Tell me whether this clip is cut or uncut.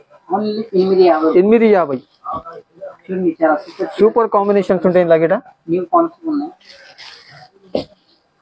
uncut